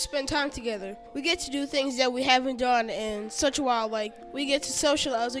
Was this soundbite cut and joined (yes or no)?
yes